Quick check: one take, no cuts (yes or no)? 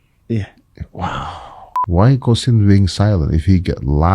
no